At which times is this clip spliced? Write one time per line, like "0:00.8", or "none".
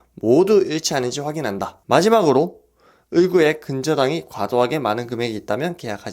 0:01.7